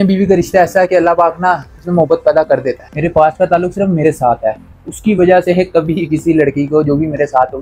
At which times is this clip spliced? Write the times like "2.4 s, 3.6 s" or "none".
2.9 s

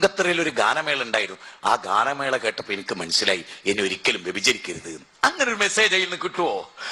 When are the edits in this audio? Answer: none

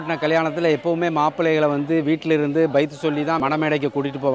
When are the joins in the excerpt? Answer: 3.4 s

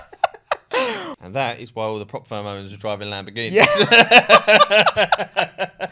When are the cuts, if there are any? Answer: 1.1 s

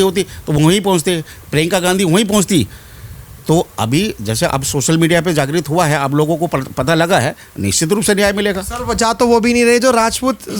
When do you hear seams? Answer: none

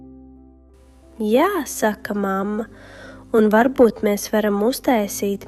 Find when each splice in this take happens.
1.2 s

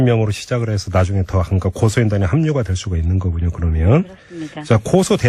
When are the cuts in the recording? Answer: 2.8 s

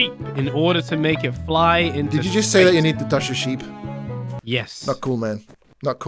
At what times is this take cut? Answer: none

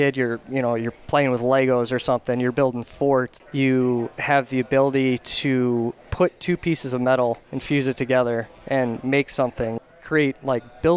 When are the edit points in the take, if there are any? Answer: 3.4 s, 6.0 s, 7.5 s, 9.8 s

